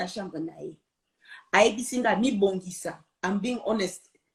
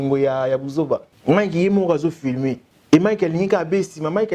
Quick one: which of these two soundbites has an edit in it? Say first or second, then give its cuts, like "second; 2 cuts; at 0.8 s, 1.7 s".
second; 2 cuts; at 1.1 s, 2.7 s